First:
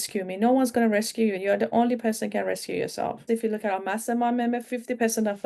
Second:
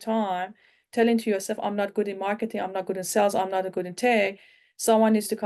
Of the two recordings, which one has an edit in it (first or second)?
first